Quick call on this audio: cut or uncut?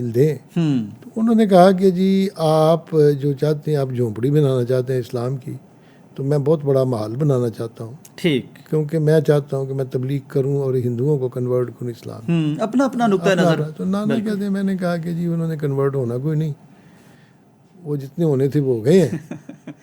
uncut